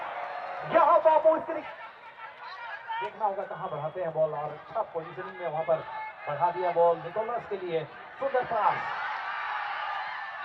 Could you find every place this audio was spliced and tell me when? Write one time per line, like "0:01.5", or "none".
0:01.5